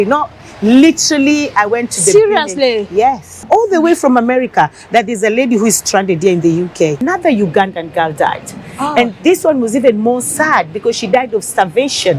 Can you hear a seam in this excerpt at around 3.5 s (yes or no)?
yes